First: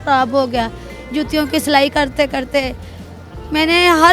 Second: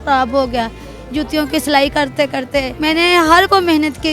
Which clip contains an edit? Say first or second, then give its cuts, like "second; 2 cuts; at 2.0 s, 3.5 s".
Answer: second; 1 cut; at 2.7 s